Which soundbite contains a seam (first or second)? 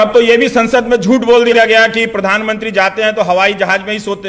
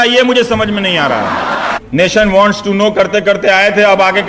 second